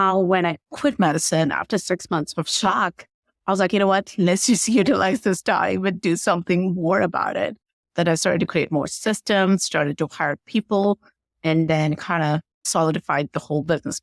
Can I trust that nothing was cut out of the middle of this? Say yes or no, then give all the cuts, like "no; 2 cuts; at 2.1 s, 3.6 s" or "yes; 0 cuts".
no; 1 cut; at 12.6 s